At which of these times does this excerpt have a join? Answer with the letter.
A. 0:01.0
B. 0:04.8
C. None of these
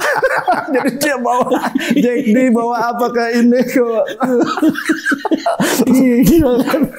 C